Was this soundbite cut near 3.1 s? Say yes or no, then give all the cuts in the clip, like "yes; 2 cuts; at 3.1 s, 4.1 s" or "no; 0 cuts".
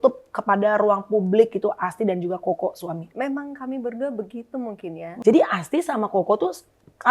yes; 2 cuts; at 3.1 s, 5.0 s